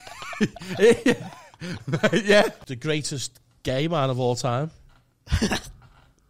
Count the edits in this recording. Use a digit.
1